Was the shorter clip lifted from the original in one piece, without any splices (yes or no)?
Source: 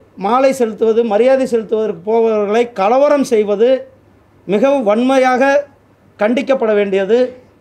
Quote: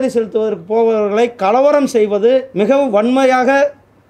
no